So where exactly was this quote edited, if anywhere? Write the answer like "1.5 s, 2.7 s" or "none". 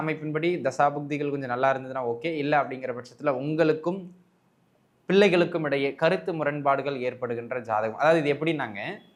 none

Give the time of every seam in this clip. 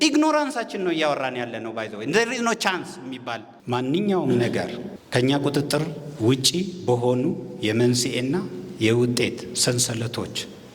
3.5 s

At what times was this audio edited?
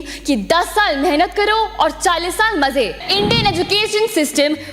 3.1 s

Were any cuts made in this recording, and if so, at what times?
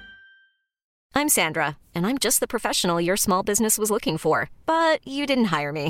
1.0 s

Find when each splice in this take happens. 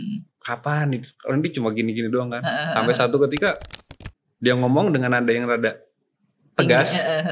none

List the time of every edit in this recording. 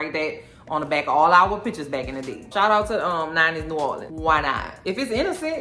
4.0 s

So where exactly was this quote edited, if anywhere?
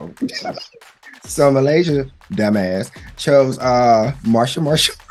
none

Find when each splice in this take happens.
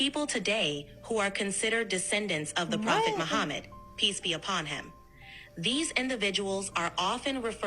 none

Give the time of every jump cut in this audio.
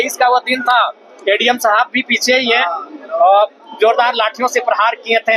none

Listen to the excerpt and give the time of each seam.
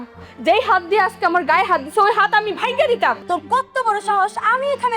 3.2 s

